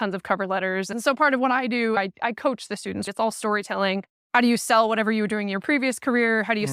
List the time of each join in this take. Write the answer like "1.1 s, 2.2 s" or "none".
0.9 s, 2.0 s, 3.1 s